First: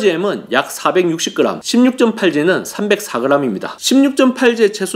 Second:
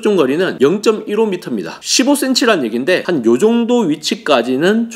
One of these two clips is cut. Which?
first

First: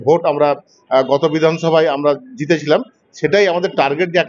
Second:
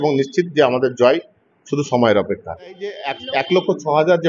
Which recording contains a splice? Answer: second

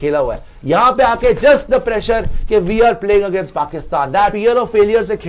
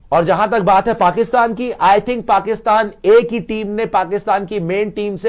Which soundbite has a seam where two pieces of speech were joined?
first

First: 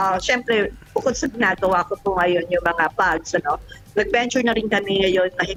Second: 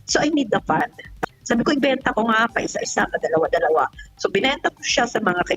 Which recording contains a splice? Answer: second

